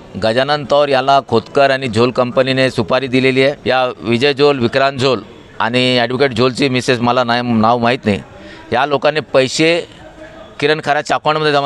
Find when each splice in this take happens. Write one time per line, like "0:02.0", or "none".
0:03.6

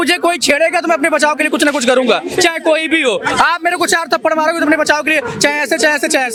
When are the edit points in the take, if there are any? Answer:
none

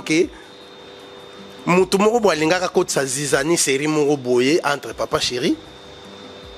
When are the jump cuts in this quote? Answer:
none

